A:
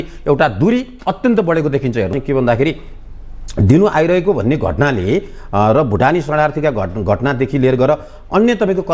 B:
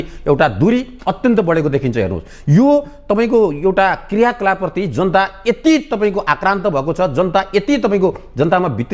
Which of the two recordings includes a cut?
A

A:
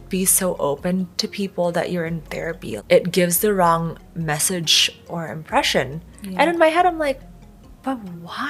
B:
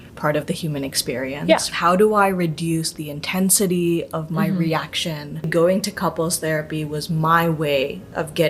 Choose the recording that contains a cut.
B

